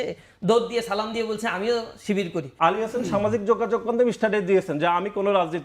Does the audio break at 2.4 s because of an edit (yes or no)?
yes